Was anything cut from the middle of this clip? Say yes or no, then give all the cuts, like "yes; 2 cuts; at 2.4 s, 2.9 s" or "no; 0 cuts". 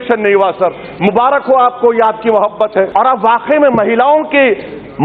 yes; 1 cut; at 2.9 s